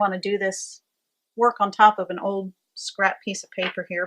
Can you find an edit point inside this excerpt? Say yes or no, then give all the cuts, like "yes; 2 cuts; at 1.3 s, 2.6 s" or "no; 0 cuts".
yes; 1 cut; at 3.1 s